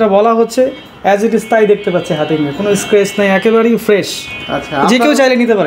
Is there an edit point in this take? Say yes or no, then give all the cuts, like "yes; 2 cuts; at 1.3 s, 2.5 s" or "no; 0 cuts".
no; 0 cuts